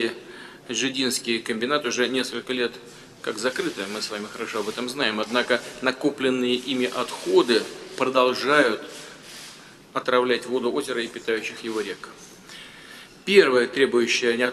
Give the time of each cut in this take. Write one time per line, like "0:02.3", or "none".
none